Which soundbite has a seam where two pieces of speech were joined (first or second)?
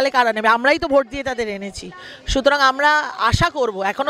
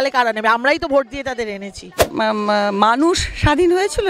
second